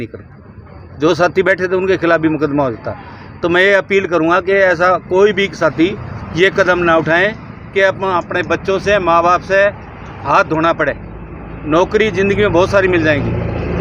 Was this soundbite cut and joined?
no; 0 cuts

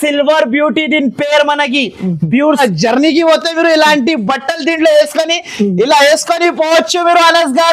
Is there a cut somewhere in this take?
yes; 1 cut; at 2.6 s

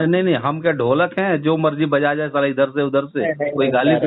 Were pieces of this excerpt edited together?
no; 0 cuts

